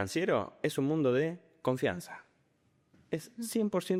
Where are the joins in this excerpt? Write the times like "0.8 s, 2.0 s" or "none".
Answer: none